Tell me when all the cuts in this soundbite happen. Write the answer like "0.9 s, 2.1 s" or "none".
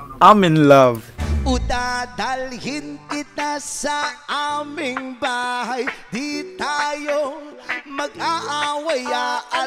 1.2 s